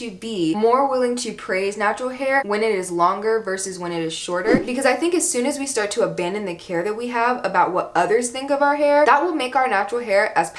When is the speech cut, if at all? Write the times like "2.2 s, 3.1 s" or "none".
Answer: 4.6 s, 9.1 s